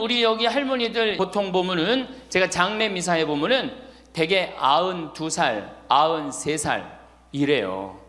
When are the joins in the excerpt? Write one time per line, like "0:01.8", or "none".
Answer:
0:01.2